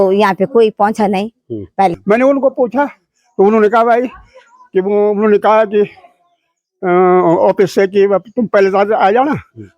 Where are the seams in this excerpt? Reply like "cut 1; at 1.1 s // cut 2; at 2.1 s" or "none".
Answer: cut 1; at 2.0 s

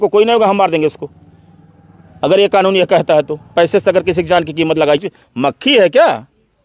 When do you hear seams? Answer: cut 1; at 5.0 s

